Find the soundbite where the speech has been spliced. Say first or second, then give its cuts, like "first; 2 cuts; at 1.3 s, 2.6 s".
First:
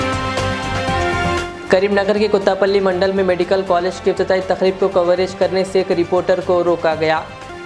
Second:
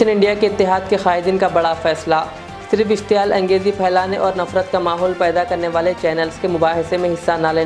first; 1 cut; at 1.3 s